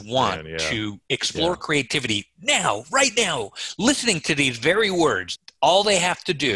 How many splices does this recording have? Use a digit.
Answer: 1